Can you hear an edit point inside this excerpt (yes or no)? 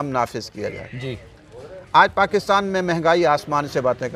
no